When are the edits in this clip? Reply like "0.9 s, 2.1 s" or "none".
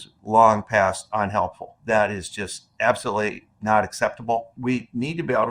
1.8 s, 4.5 s